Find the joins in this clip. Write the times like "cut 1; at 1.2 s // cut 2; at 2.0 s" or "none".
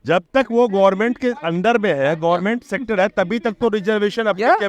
none